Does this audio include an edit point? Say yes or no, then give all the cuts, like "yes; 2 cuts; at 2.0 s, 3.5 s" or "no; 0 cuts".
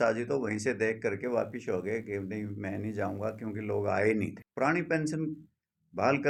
no; 0 cuts